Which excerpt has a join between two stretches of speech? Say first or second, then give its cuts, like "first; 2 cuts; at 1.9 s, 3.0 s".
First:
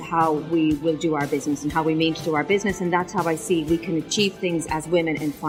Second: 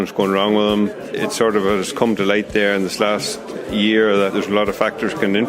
second; 2 cuts; at 1.0 s, 4.3 s